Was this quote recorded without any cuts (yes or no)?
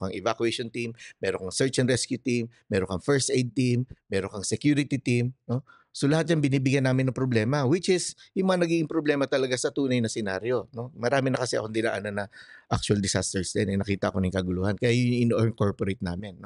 yes